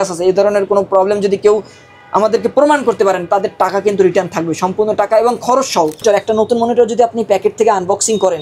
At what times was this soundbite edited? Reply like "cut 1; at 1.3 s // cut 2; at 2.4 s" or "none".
cut 1; at 6.0 s